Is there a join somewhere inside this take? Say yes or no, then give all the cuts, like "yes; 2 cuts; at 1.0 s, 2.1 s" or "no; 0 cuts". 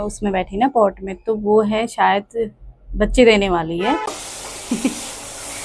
yes; 1 cut; at 4.3 s